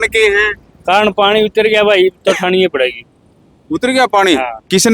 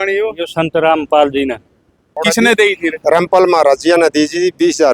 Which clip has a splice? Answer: second; 1 cut; at 2.2 s

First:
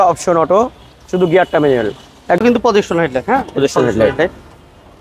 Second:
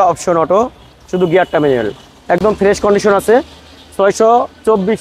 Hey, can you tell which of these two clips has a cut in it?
first; 1 cut; at 2.4 s

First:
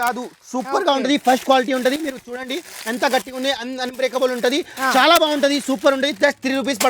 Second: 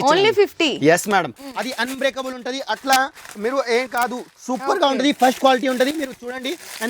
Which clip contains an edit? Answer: second; 1 cut; at 1.3 s

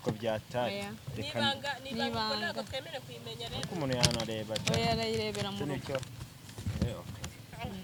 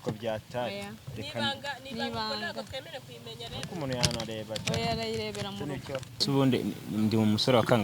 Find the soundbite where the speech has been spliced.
second; 1 cut; at 6.2 s

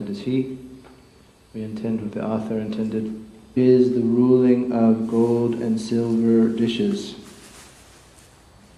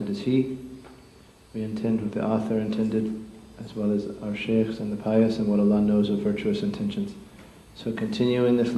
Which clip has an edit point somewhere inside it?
second; 1 cut; at 3.5 s

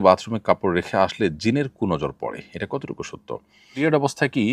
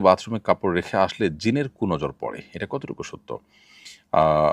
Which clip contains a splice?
first; 1 cut; at 3.6 s

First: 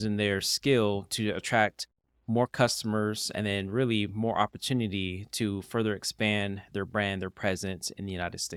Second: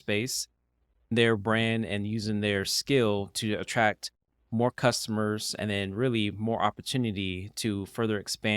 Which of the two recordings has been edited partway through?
second; 1 cut; at 1.1 s

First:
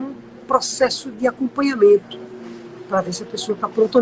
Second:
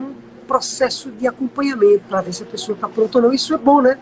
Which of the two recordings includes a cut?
second; 1 cut; at 2.1 s

